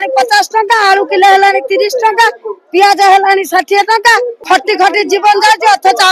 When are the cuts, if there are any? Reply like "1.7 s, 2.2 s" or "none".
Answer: 4.4 s